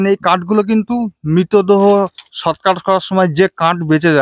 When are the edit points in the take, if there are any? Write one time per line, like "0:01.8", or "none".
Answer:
none